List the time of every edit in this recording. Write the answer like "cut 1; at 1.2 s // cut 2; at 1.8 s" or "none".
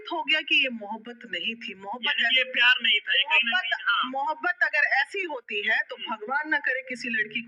none